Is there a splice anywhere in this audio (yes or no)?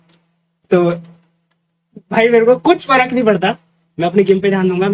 no